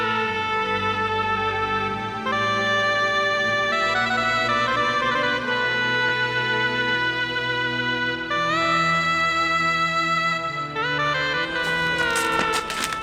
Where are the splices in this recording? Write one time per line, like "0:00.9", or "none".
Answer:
none